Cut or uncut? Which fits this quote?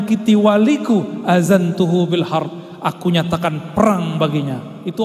uncut